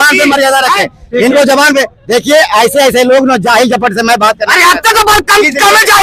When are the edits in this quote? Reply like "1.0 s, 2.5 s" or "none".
none